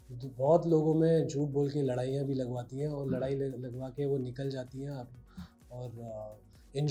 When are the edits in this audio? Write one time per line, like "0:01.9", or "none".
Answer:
none